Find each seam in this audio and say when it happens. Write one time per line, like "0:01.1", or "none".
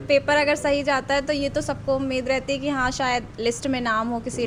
none

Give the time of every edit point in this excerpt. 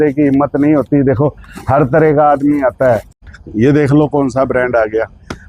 0:03.3

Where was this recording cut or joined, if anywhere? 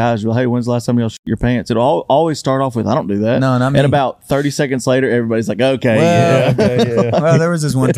none

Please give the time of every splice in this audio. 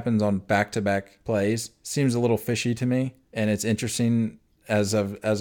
0:01.1
0:01.8
0:03.2

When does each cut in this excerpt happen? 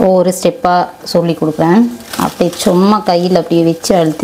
0:02.0

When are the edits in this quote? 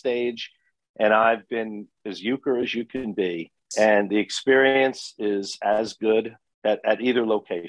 0:03.6
0:06.4

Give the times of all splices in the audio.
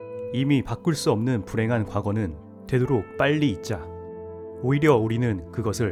none

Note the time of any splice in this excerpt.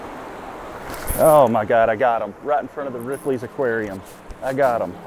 none

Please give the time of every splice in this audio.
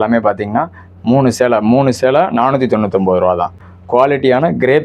0:03.6

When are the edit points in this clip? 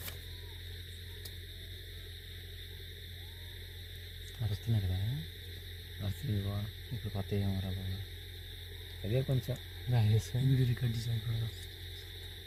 none

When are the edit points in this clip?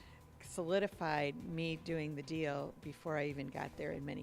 none

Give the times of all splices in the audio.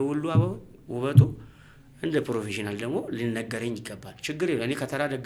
none

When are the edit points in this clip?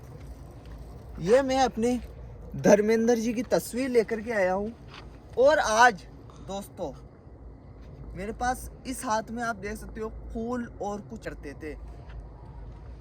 0:11.2

